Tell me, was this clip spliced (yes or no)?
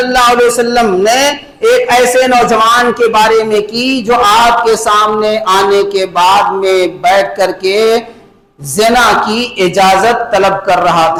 no